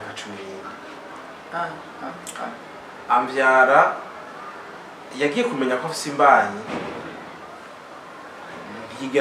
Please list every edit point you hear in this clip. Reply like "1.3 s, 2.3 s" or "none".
none